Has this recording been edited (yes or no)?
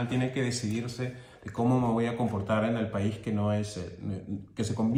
no